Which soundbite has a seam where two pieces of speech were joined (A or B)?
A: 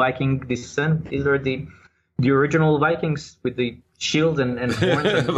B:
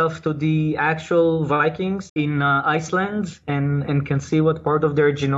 B